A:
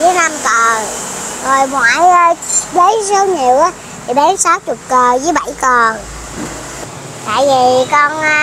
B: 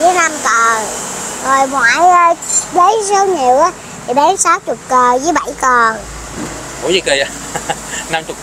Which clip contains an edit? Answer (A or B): A